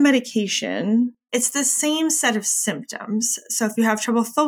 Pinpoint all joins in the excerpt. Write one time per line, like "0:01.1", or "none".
0:01.2